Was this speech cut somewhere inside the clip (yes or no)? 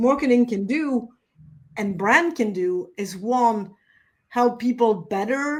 no